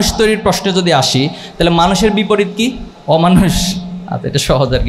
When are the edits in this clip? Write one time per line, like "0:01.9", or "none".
0:02.9